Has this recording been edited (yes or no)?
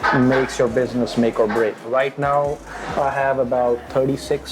yes